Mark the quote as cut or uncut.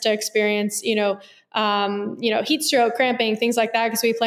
uncut